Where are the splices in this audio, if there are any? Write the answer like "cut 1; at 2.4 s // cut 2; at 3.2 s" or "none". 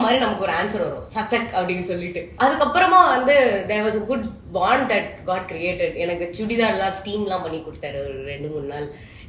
cut 1; at 2.3 s

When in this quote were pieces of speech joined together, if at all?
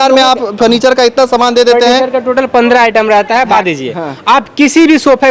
cut 1; at 3.5 s

